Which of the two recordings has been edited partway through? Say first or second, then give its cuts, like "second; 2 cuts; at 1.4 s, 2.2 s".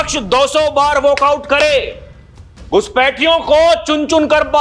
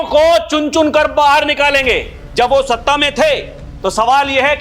second; 1 cut; at 2.2 s